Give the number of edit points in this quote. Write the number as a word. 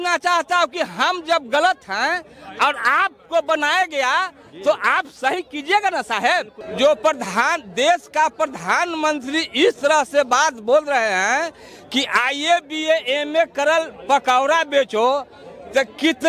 one